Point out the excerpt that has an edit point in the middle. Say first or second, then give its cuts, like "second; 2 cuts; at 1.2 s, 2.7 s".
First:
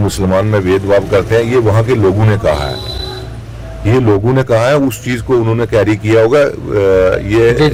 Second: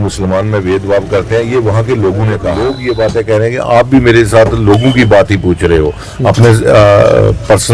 second; 1 cut; at 2.6 s